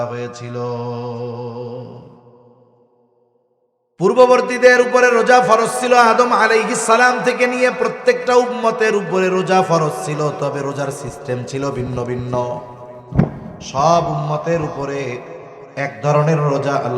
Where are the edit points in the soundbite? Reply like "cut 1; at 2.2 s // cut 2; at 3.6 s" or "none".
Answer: cut 1; at 3.3 s